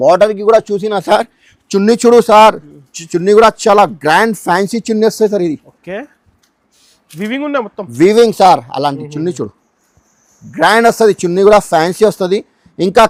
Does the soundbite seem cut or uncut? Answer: uncut